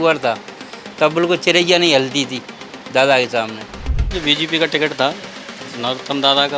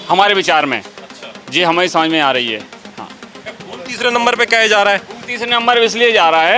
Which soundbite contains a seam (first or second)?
first